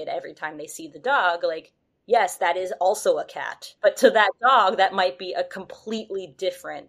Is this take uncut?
no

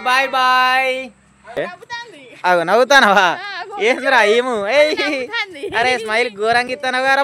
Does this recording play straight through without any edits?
no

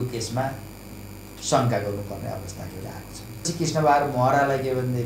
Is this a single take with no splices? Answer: no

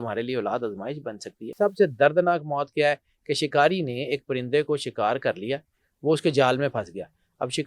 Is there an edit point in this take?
yes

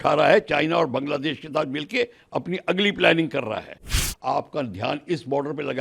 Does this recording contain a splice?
yes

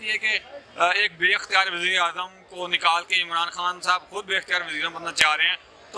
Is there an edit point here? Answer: no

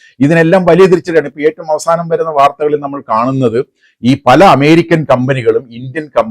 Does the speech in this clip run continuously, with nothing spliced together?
yes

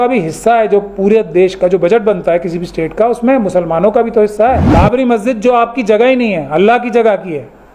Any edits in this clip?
yes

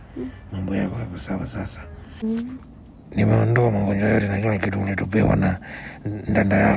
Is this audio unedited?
no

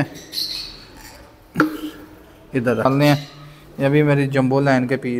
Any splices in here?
yes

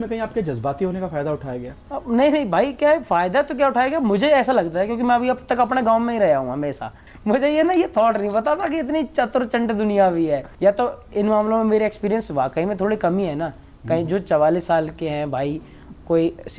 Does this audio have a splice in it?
yes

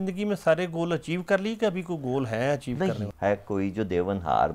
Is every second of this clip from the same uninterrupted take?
no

